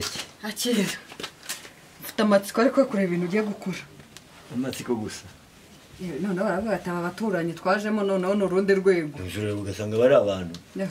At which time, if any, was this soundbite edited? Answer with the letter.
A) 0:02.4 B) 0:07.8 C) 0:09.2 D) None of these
D